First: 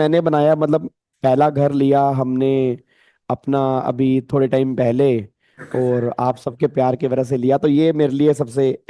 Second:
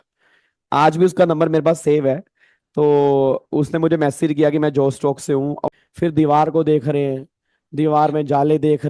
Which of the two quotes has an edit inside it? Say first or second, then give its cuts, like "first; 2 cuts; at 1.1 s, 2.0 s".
second; 1 cut; at 5.6 s